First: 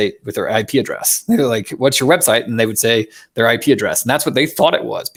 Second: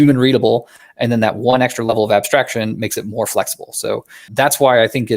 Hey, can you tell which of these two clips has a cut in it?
second; 1 cut; at 4.3 s

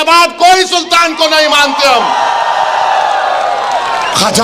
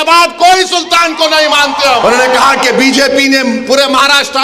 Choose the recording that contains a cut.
second; 1 cut; at 2.0 s

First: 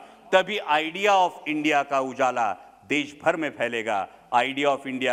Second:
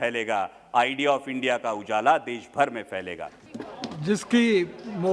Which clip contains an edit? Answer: second; 1 cut; at 3.3 s

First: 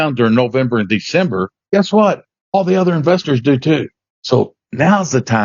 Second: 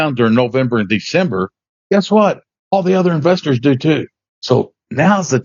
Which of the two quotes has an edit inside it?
first; 1 cut; at 1.5 s

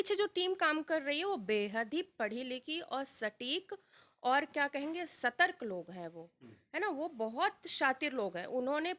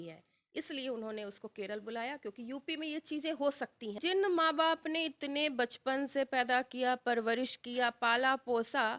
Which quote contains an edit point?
second; 1 cut; at 4.0 s

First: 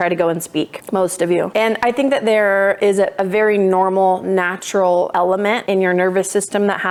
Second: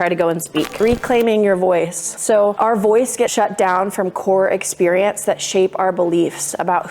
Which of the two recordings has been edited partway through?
second; 2 cuts; at 0.8 s, 3.3 s

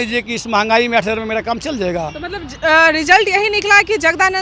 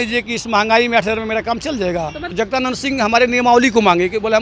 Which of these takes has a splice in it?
second; 1 cut; at 2.2 s

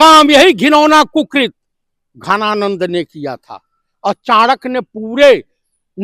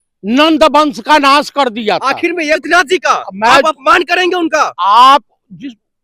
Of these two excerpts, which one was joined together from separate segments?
second; 1 cut; at 2.6 s

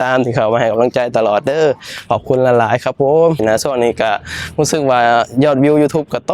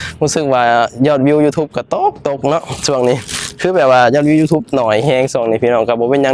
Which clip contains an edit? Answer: first; 1 cut; at 3.4 s

